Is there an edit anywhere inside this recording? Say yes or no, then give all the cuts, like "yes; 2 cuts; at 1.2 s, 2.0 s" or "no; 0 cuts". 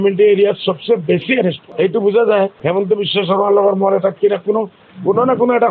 yes; 2 cuts; at 1.6 s, 2.6 s